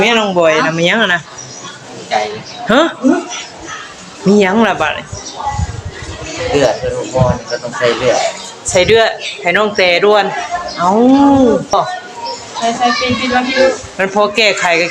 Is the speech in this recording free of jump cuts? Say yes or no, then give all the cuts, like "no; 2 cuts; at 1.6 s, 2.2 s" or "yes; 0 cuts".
no; 1 cut; at 11.7 s